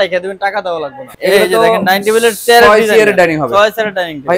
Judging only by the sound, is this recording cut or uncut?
cut